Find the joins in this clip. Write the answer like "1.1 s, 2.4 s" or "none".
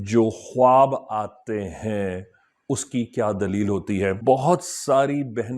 4.2 s